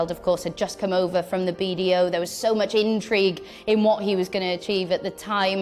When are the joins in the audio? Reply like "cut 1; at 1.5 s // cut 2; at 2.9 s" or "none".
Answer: none